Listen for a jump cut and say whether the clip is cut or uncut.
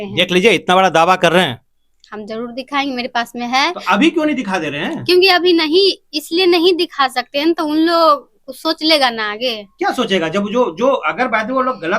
uncut